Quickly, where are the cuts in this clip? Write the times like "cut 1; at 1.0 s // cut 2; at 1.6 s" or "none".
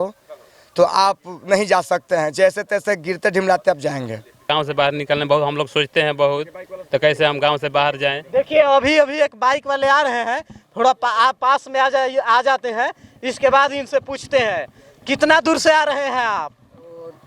cut 1; at 4.5 s